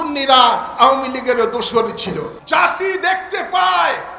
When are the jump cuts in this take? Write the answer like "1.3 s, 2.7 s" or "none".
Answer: 2.4 s